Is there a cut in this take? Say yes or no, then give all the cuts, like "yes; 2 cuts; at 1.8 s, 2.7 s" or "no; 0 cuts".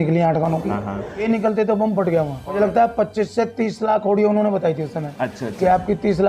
yes; 2 cuts; at 1.2 s, 2.4 s